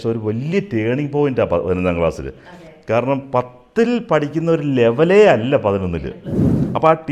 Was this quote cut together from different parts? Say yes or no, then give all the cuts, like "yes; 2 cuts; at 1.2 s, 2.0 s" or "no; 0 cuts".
yes; 1 cut; at 6.2 s